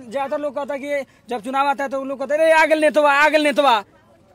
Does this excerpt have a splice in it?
no; 0 cuts

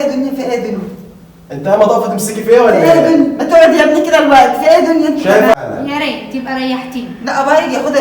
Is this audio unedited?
no; 1 cut; at 5.5 s

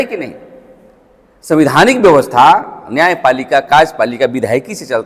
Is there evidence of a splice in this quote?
no; 0 cuts

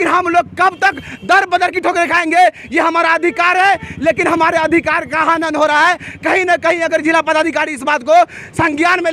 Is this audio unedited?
yes; 0 cuts

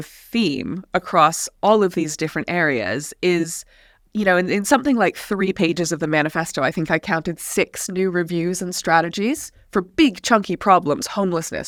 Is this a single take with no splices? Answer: yes; 0 cuts

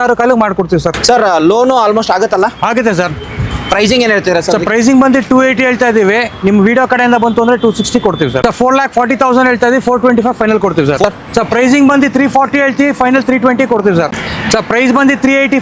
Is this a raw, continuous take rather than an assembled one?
no; 4 cuts; at 0.9 s, 8.4 s, 11.0 s, 14.2 s

